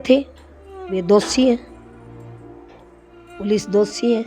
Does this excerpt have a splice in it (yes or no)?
yes